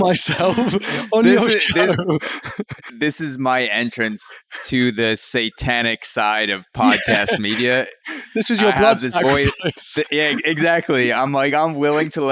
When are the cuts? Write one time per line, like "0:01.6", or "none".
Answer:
0:02.9